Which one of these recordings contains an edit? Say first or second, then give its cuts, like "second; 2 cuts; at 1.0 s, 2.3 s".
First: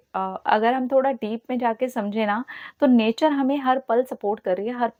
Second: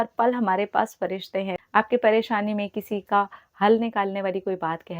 second; 1 cut; at 1.5 s